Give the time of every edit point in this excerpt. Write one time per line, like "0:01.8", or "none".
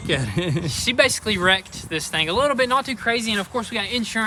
none